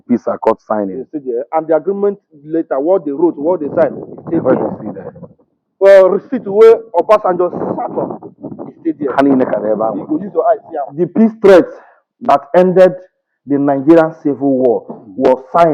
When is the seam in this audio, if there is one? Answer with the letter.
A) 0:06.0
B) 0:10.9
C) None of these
B